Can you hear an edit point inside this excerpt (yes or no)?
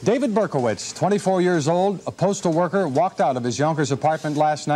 no